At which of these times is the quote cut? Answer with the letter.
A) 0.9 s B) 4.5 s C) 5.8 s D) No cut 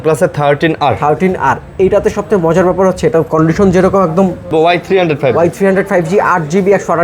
B